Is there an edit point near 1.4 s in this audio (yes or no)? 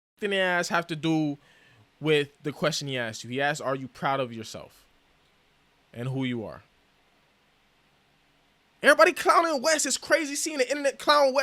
no